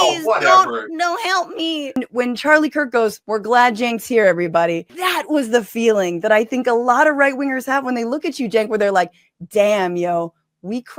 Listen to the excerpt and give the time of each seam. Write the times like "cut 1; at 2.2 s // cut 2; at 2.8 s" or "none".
cut 1; at 1.9 s // cut 2; at 3.2 s // cut 3; at 4.9 s